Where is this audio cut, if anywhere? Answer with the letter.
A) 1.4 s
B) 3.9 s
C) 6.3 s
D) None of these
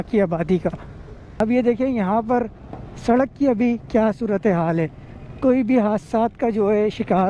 A